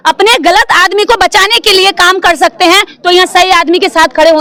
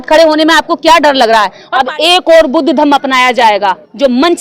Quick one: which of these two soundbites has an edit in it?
second; 1 cut; at 1.6 s

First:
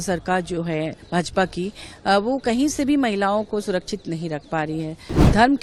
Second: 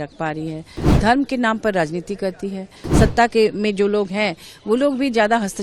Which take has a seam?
second; 1 cut; at 2.8 s

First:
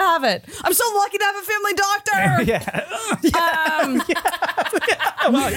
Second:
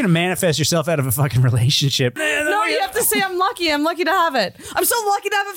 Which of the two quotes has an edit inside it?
second; 1 cut; at 2.2 s

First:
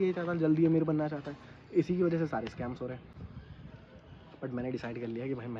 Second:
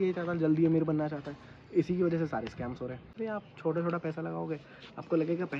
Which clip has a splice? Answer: second; 1 cut; at 3.1 s

